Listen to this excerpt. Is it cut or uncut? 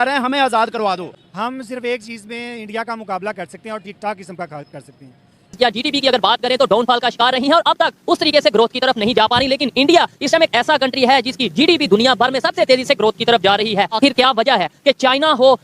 cut